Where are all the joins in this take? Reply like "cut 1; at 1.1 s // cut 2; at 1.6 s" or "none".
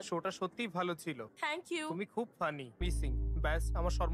cut 1; at 1.3 s // cut 2; at 2.8 s